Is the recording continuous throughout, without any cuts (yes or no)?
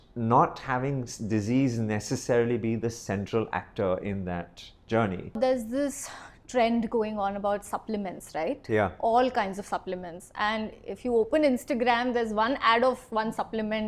no